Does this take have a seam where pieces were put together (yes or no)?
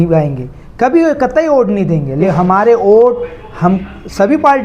yes